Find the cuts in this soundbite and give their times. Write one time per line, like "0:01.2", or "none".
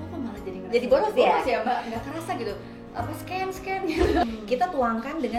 0:04.2